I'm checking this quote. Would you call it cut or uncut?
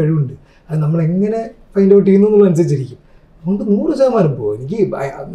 uncut